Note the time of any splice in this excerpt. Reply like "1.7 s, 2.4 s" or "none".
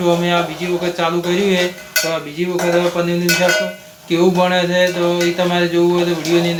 none